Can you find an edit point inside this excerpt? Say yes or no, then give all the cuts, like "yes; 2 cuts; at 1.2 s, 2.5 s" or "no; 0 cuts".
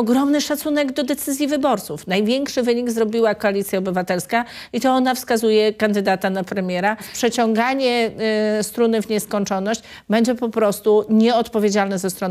yes; 1 cut; at 7.1 s